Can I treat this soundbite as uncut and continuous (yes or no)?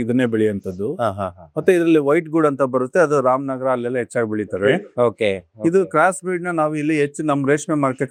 yes